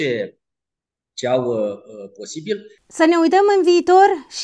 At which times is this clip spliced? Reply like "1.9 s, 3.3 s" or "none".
2.8 s